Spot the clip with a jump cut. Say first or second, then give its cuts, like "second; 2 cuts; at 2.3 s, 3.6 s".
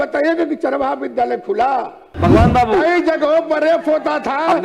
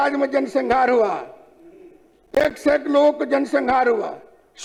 first; 1 cut; at 2.0 s